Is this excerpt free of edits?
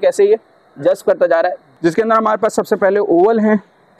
no; 1 cut; at 1.6 s

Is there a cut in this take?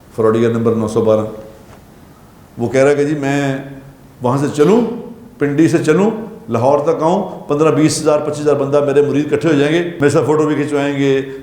yes; 1 cut; at 9.9 s

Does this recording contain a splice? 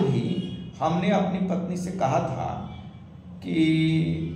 no; 0 cuts

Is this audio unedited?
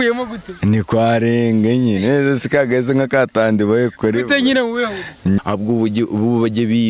no; 1 cut; at 5.4 s

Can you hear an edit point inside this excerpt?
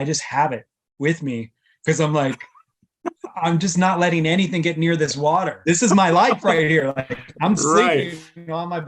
yes; 1 cut; at 5.6 s

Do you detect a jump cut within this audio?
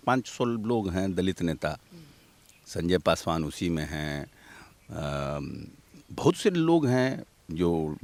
no; 0 cuts

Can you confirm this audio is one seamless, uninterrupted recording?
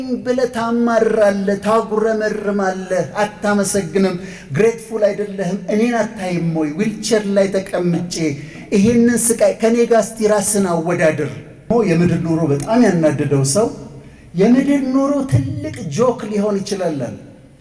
no; 1 cut; at 11.7 s

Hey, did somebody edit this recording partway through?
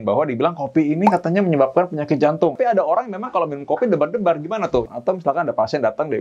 yes; 2 cuts; at 2.5 s, 4.8 s

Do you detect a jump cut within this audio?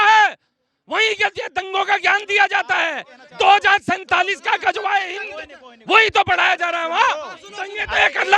no; 0 cuts

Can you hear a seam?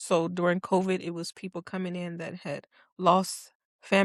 no; 0 cuts

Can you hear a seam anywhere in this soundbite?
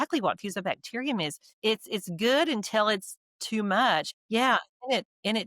yes; 2 cuts; at 1.4 s, 4.2 s

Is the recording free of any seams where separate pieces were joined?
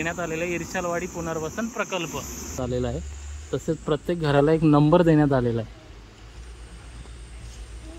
no; 1 cut; at 2.6 s

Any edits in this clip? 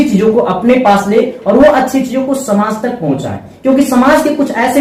no; 0 cuts

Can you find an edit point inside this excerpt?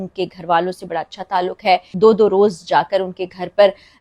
yes; 1 cut; at 2.0 s

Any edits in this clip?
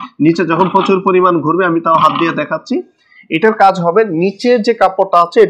no; 0 cuts

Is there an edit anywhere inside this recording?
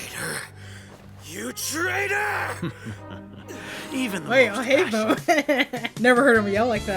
yes; 1 cut; at 5.8 s

